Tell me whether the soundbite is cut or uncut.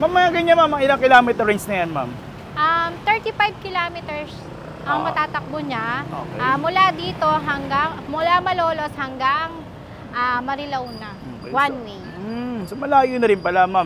uncut